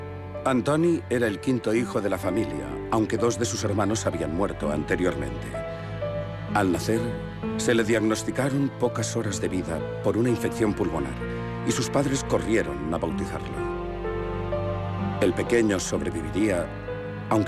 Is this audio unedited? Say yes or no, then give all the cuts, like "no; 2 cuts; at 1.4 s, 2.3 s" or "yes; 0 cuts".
no; 1 cut; at 12.9 s